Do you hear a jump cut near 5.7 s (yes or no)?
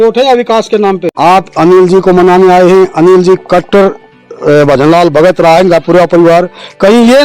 no